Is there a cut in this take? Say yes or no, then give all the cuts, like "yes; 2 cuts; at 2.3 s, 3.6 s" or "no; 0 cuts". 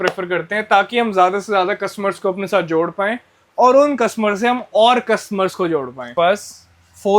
yes; 1 cut; at 6.1 s